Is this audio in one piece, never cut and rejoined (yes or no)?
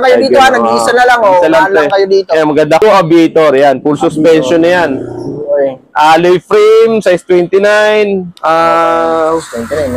no